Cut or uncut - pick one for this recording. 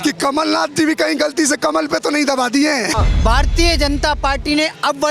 cut